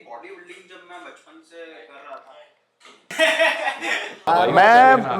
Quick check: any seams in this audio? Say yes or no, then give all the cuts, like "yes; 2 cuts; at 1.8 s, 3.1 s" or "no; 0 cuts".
yes; 2 cuts; at 3.1 s, 4.3 s